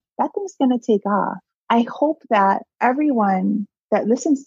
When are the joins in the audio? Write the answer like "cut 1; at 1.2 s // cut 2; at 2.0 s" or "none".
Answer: cut 1; at 1.5 s // cut 2; at 2.7 s